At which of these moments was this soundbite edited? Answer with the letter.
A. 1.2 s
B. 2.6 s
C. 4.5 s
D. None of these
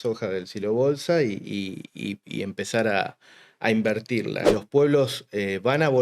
C